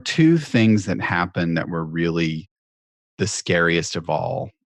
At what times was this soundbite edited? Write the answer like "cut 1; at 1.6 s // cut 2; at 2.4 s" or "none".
none